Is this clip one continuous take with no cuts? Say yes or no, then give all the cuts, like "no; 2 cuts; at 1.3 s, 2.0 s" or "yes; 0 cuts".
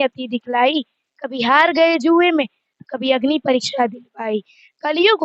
yes; 0 cuts